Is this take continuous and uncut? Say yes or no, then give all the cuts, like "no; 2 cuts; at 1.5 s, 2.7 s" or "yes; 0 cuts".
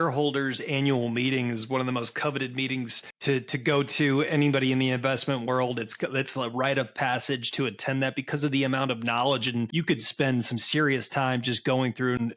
no; 2 cuts; at 3.0 s, 9.7 s